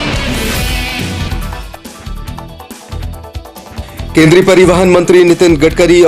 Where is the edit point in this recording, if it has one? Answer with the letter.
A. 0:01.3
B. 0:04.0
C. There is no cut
B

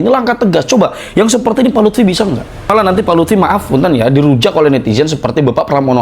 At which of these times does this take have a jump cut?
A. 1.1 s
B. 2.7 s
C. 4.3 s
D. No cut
B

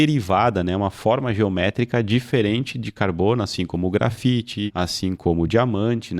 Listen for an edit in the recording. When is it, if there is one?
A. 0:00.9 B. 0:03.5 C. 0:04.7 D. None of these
C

